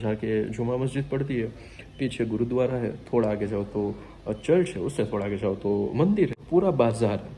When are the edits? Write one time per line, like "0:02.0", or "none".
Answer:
0:06.4